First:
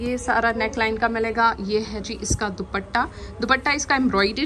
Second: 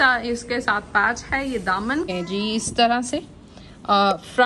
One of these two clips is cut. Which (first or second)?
second